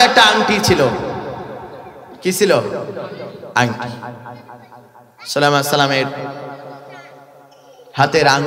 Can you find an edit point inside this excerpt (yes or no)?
no